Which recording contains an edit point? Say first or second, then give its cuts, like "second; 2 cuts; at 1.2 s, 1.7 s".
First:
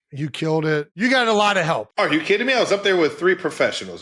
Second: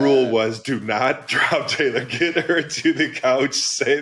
first; 1 cut; at 0.9 s